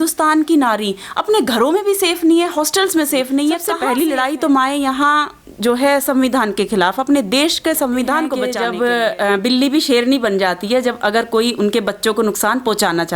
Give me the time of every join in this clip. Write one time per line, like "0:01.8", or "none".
0:03.7
0:08.5